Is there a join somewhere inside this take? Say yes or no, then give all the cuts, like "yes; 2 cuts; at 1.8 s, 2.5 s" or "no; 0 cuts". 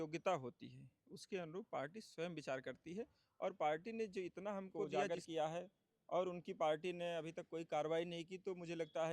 yes; 1 cut; at 4.9 s